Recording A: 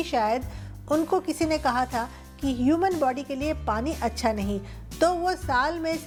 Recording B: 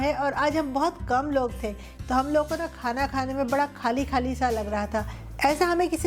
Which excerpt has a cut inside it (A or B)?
B